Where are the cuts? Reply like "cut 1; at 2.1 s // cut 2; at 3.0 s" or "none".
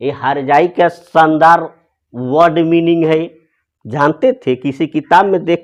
none